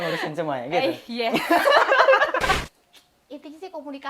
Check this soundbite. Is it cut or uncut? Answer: cut